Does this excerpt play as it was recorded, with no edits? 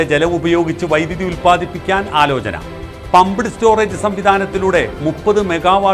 yes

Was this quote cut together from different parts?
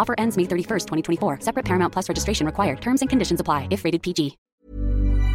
yes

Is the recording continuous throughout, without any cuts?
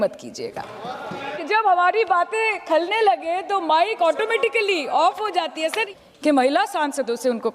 no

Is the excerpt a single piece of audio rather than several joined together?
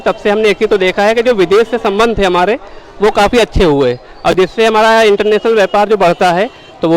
yes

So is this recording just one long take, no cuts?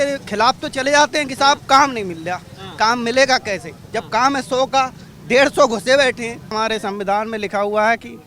no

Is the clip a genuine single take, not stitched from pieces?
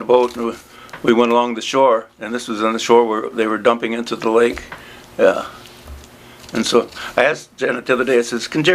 no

